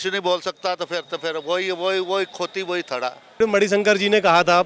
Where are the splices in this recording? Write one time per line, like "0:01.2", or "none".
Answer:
0:03.4